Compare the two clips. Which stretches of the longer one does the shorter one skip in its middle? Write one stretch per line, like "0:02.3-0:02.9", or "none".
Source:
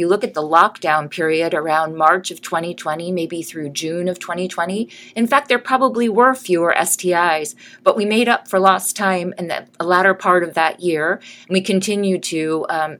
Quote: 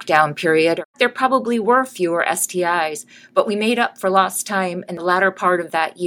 0:01.7-0:05.4
0:09.4-0:09.7